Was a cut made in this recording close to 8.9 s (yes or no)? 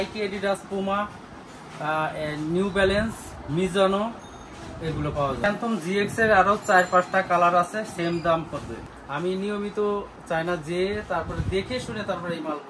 yes